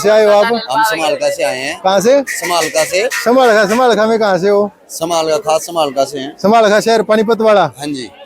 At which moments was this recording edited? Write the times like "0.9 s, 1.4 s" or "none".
none